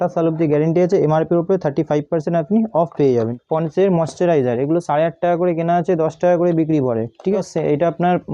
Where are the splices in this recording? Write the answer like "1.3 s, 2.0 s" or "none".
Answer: 3.3 s, 7.4 s

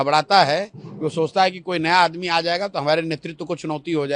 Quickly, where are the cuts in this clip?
none

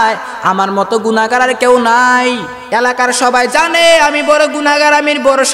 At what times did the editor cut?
2.5 s

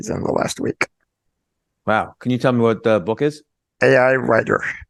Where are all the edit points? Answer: none

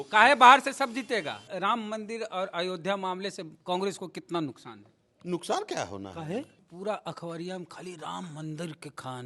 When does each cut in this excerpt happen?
1.4 s, 6.6 s

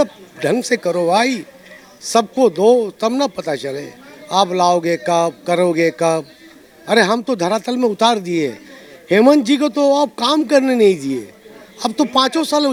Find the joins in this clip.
none

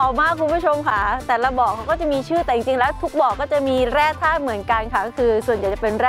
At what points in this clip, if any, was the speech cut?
none

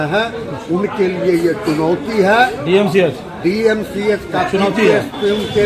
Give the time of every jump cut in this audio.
none

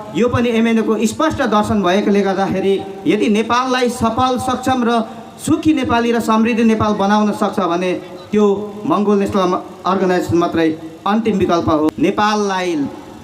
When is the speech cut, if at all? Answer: 11.9 s

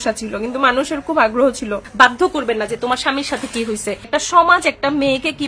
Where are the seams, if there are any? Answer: 1.8 s, 4.0 s

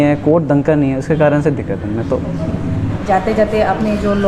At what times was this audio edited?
none

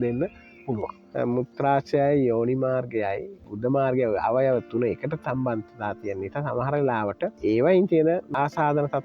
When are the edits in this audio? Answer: 1.0 s, 7.4 s, 8.3 s

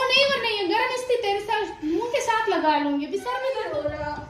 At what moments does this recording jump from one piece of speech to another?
3.3 s

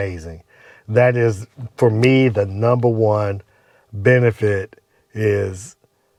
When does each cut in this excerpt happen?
none

